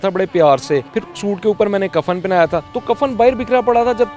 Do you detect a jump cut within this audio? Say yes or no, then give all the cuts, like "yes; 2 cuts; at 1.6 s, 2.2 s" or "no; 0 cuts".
yes; 2 cuts; at 0.9 s, 2.7 s